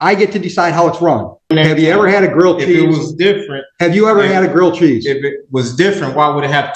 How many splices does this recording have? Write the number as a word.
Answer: one